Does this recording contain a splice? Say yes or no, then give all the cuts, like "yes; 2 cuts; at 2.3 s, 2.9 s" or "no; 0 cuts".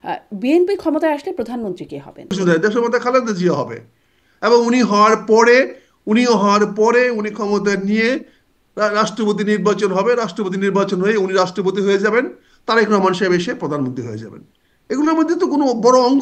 yes; 1 cut; at 2.3 s